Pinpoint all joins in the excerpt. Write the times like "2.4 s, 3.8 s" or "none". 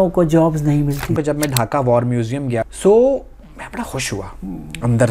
1.2 s, 2.7 s